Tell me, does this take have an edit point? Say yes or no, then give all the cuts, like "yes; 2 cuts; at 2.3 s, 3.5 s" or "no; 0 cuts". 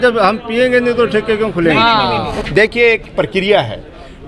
yes; 1 cut; at 2.3 s